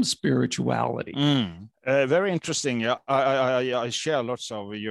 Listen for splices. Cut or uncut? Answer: cut